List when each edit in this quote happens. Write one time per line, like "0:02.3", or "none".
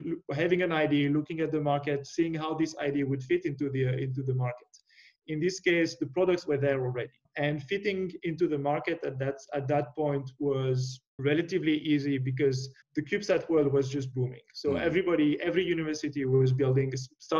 0:07.2
0:11.1
0:12.7
0:14.1